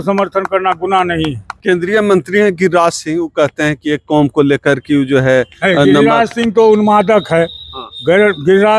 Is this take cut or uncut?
cut